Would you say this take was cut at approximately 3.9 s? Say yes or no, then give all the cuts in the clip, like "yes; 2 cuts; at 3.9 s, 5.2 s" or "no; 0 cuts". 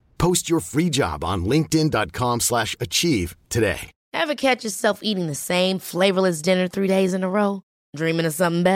yes; 1 cut; at 3.9 s